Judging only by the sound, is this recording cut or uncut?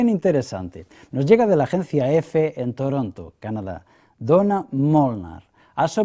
cut